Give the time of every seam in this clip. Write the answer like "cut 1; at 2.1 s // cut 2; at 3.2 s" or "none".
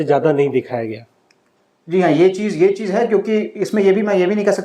none